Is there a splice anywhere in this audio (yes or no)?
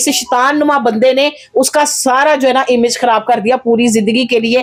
no